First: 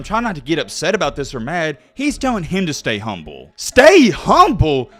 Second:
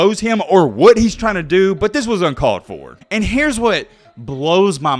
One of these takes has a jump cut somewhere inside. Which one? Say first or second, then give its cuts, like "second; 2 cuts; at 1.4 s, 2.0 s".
second; 1 cut; at 2.9 s